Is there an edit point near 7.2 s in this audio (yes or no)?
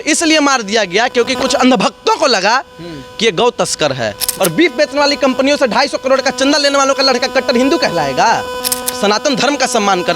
no